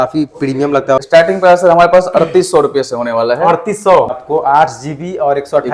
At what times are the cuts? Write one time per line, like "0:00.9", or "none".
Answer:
0:01.0
0:04.2